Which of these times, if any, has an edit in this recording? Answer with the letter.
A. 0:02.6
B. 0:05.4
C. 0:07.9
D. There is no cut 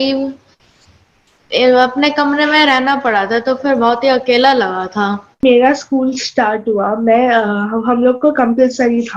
B